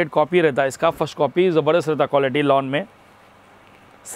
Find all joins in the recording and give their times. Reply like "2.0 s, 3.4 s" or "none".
none